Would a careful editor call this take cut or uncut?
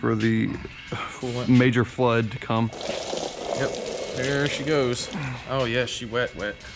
uncut